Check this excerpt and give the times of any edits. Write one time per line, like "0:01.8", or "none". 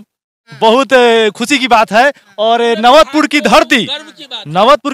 none